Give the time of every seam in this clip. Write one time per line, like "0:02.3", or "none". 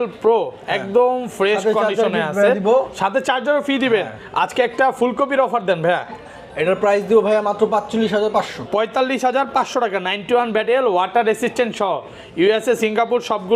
none